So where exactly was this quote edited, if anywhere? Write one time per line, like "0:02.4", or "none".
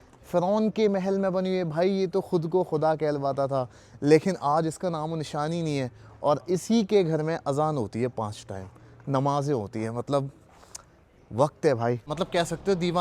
0:12.1